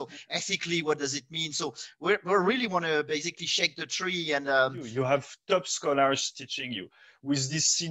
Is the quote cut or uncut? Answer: cut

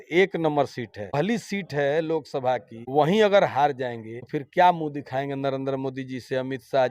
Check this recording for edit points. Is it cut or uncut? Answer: cut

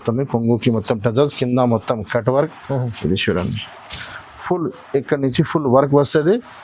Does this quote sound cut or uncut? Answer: uncut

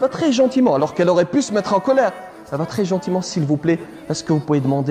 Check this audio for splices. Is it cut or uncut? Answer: uncut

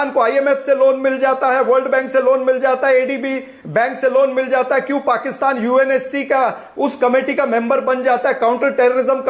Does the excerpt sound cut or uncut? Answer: uncut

